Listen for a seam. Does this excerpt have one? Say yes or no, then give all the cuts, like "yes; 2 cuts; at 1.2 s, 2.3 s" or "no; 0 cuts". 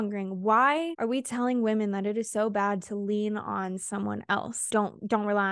yes; 2 cuts; at 0.9 s, 4.6 s